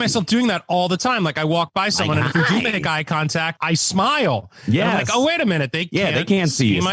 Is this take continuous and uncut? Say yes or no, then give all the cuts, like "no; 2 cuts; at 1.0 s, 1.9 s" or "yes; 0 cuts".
yes; 0 cuts